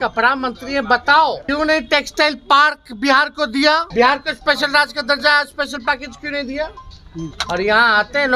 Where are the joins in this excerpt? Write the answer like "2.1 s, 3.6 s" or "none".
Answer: 1.4 s, 3.9 s